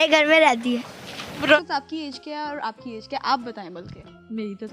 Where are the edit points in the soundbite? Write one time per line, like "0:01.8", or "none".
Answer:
0:01.6